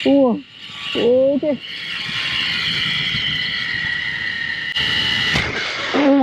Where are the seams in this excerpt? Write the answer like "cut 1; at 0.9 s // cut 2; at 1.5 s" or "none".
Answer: none